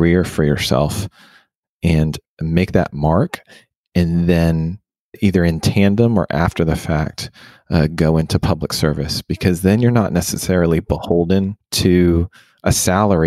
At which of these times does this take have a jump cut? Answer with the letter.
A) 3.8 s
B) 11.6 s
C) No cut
B